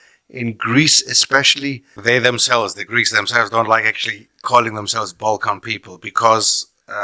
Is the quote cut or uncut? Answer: cut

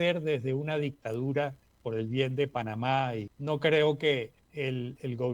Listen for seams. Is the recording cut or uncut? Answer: cut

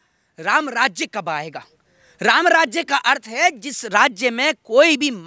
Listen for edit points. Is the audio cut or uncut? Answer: uncut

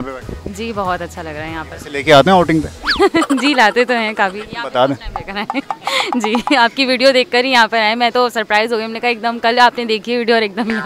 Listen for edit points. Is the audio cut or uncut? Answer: uncut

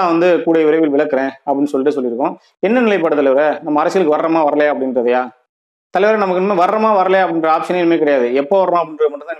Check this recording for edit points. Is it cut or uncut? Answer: uncut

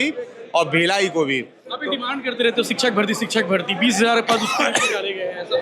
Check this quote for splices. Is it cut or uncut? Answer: uncut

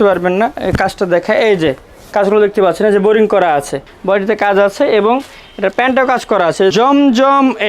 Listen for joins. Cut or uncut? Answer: cut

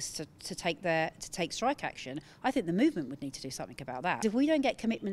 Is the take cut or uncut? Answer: cut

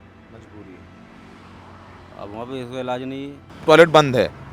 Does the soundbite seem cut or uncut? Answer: cut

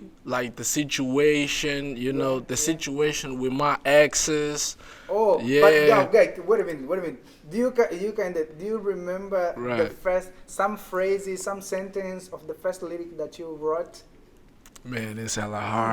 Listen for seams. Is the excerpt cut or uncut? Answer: uncut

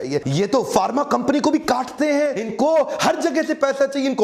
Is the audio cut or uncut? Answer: cut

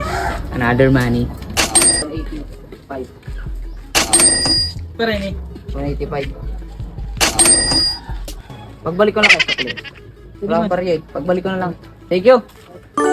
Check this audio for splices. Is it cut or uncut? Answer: cut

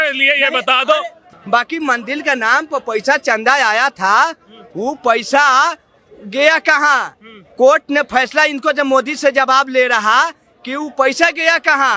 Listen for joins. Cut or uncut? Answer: cut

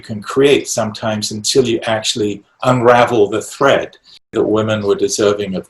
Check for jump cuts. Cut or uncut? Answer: cut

